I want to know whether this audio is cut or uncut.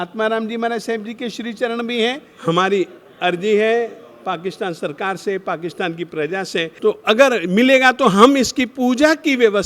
cut